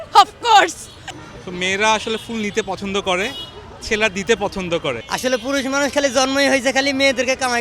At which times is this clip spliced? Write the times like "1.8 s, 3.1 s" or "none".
1.0 s, 5.1 s

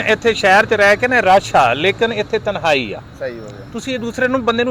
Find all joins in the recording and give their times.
none

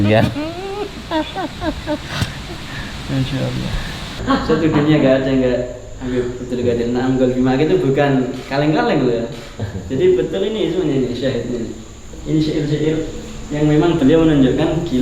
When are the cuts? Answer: 4.1 s

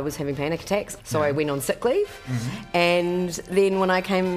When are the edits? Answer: 0.9 s

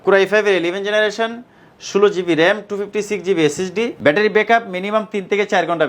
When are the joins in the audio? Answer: 3.9 s

